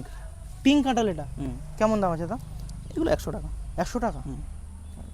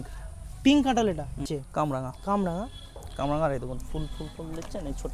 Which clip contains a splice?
second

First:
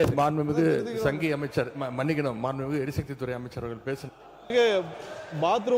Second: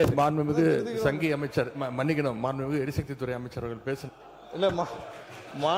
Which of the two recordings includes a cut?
first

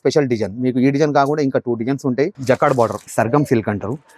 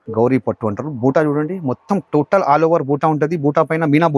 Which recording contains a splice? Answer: first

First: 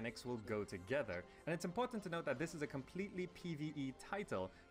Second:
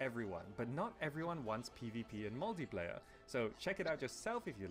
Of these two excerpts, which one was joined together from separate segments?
first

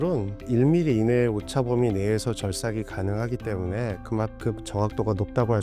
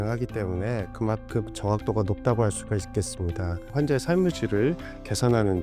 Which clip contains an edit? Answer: second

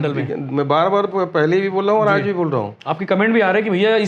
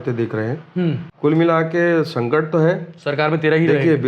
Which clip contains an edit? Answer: second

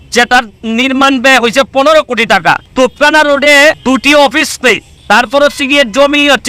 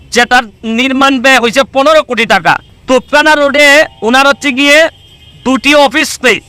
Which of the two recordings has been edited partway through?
first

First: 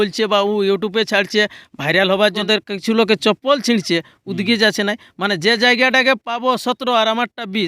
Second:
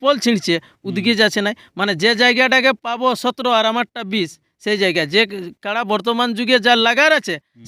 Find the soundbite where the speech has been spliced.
first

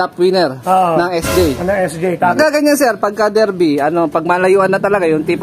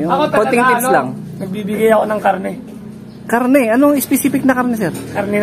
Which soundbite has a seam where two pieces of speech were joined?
first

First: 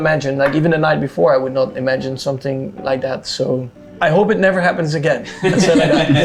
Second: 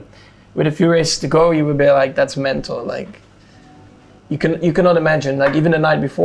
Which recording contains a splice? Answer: first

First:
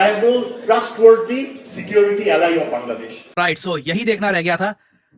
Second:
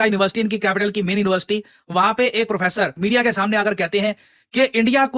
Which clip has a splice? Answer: first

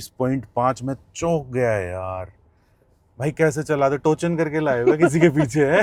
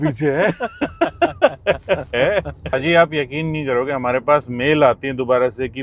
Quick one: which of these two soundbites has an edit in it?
second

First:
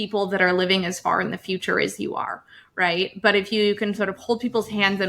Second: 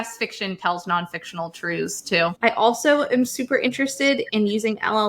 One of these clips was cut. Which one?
second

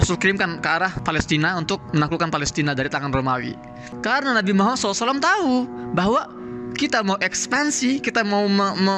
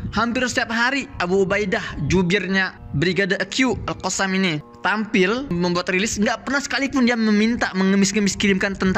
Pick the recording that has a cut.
second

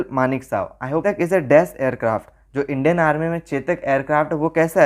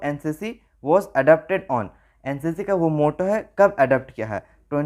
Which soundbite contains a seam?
first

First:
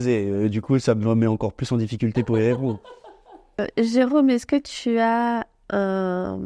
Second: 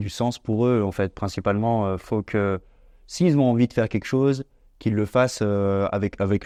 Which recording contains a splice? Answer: first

